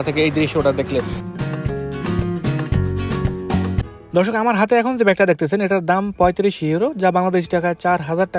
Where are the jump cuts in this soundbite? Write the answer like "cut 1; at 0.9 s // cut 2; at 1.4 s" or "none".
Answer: cut 1; at 3.9 s